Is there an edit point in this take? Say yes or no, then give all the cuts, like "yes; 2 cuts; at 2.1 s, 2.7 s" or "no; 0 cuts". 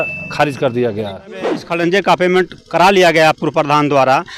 yes; 1 cut; at 1.7 s